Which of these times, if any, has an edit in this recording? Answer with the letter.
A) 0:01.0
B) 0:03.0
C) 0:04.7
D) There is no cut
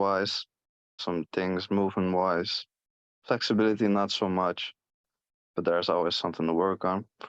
A